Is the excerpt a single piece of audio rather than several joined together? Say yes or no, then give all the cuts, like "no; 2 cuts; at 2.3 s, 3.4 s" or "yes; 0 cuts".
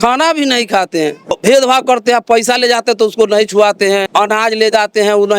no; 2 cuts; at 1.3 s, 4.1 s